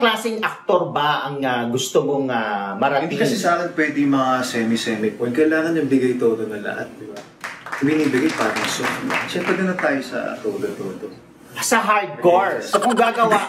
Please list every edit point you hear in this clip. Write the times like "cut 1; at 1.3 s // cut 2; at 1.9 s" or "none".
none